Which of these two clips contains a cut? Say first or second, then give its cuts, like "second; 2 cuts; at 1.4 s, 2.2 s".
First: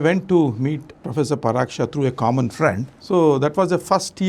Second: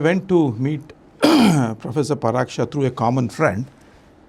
first; 2 cuts; at 1.0 s, 2.9 s